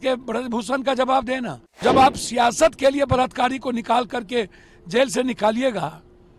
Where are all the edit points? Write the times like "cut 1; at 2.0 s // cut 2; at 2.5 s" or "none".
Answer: cut 1; at 1.8 s